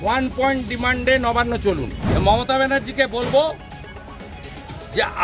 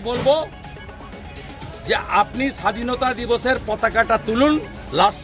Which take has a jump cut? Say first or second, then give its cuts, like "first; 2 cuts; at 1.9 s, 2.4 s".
first; 1 cut; at 2.0 s